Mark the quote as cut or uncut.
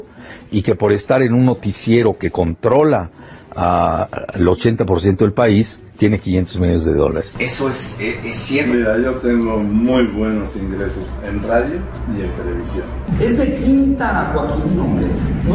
cut